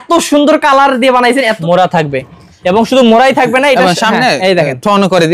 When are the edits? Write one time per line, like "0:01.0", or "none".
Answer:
0:01.6